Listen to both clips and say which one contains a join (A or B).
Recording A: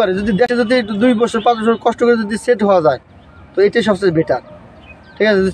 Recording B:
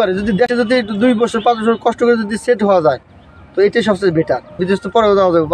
B